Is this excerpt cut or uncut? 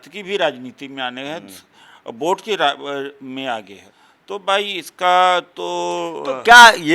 uncut